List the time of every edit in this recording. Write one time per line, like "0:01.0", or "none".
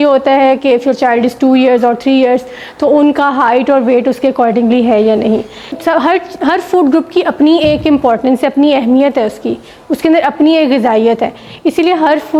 0:05.7